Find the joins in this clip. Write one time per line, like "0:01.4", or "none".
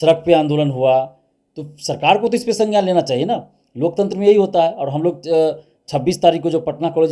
none